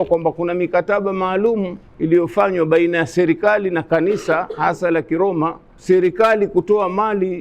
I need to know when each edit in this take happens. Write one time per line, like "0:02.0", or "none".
0:01.8
0:05.7